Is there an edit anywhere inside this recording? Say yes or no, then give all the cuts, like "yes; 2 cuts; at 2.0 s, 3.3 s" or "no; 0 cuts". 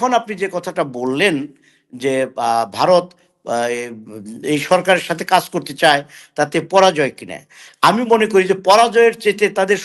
no; 0 cuts